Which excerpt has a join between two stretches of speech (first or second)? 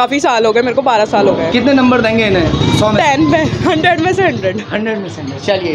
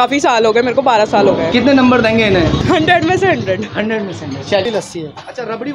second